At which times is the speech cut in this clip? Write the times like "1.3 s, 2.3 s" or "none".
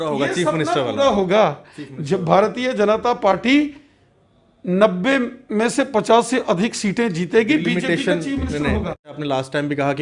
9.1 s